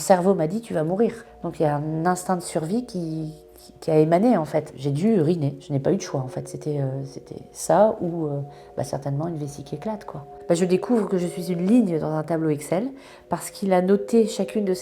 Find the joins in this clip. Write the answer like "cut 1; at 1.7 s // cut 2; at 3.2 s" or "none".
cut 1; at 10.4 s

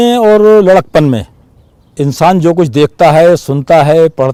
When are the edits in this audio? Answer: none

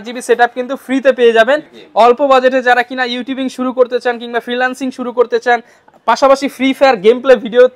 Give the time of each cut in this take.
cut 1; at 1.8 s

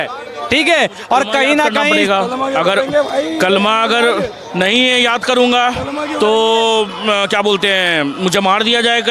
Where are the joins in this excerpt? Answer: cut 1; at 2.0 s

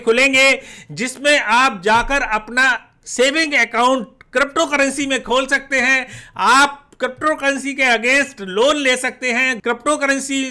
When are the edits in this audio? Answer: cut 1; at 9.5 s

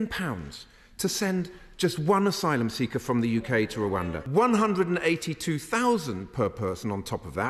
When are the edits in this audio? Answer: cut 1; at 4.2 s

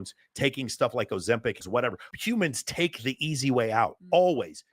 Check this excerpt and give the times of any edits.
cut 1; at 1.6 s

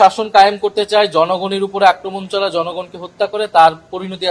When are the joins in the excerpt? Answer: none

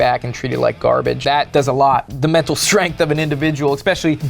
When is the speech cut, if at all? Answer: cut 1; at 1.2 s // cut 2; at 2.1 s

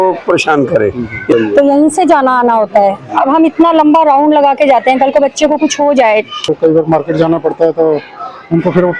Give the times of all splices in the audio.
cut 1; at 1.3 s // cut 2; at 6.5 s

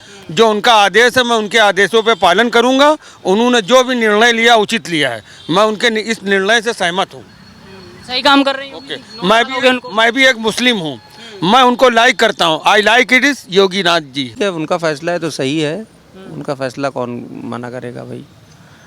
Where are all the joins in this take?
cut 1; at 14.3 s

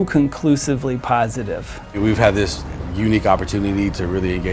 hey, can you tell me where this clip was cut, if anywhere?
cut 1; at 1.8 s

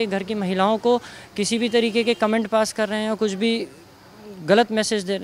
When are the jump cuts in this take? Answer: none

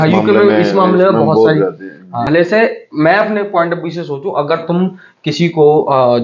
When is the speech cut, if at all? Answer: cut 1; at 2.2 s

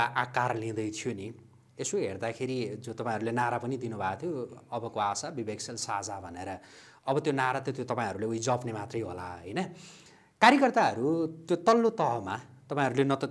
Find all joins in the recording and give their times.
none

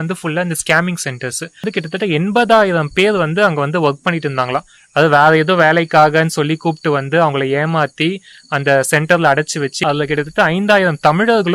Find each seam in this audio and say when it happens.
cut 1; at 1.6 s // cut 2; at 9.8 s

